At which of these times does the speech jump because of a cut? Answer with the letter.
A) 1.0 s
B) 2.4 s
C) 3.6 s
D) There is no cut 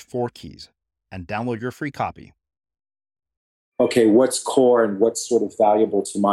C